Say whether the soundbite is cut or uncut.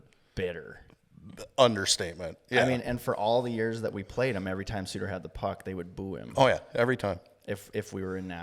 uncut